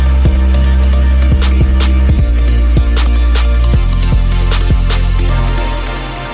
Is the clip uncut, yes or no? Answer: yes